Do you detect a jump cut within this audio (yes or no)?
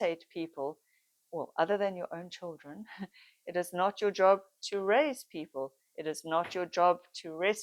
no